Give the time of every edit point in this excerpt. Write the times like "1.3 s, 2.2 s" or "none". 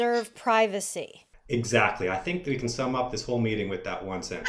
none